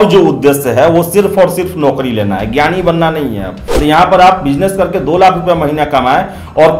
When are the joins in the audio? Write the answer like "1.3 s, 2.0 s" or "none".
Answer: 3.8 s

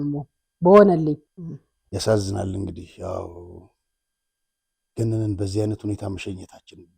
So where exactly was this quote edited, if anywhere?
none

